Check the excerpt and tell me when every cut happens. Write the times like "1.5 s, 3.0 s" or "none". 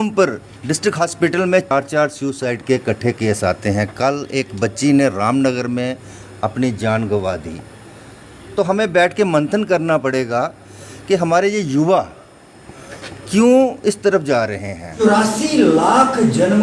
1.7 s, 14.9 s